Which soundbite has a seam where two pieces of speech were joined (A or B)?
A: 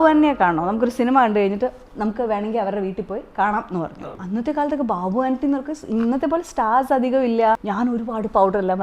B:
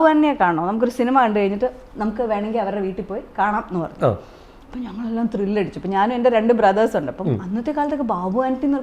A